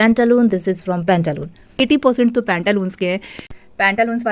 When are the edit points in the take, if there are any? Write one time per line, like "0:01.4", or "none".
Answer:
0:01.7

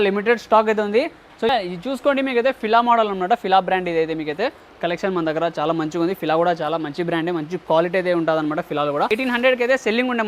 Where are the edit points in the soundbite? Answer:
0:01.6
0:09.1

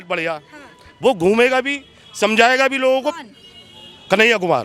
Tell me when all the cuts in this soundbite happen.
none

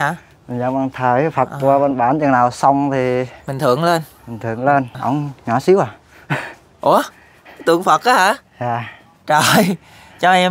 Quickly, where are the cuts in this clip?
0:04.9

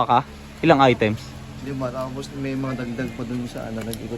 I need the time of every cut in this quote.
none

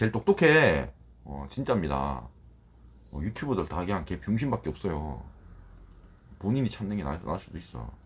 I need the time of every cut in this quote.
none

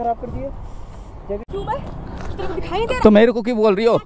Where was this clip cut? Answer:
0:01.4

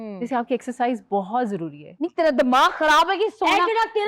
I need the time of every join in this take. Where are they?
0:01.8

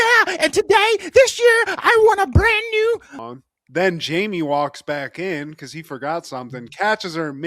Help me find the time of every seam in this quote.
0:03.2

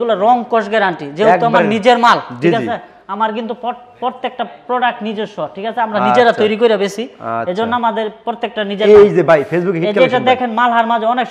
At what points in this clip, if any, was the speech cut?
none

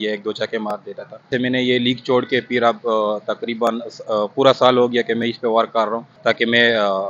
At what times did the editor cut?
0:01.3
0:06.1

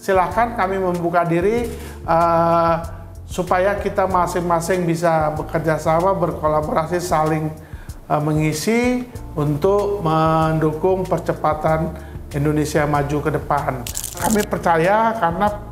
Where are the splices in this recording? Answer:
0:14.2

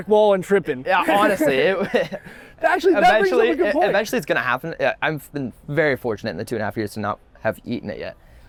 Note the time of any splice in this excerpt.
none

